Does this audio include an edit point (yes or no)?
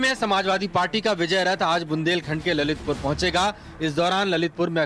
yes